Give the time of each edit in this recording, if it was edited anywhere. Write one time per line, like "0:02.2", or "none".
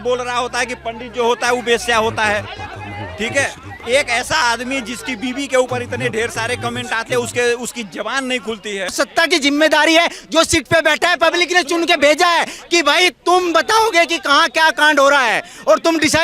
0:08.9